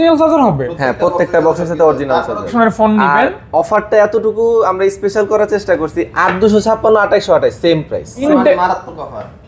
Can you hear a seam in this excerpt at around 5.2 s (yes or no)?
no